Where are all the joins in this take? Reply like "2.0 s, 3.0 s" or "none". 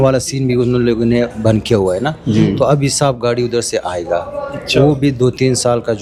none